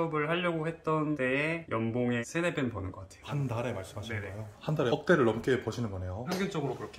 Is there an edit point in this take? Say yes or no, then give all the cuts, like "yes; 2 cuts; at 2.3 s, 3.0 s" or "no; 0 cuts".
yes; 1 cut; at 4.6 s